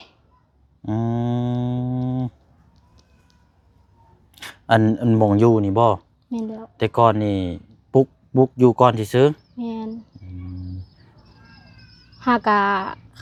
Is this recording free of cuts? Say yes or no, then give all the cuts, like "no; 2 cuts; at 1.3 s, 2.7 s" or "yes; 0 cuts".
yes; 0 cuts